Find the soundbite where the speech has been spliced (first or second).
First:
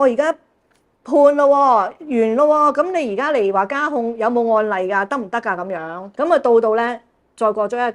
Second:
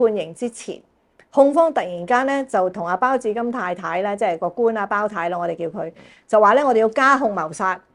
first